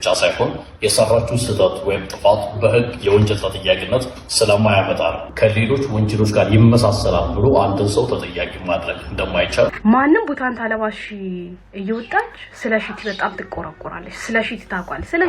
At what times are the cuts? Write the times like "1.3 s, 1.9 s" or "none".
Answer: 5.3 s, 9.8 s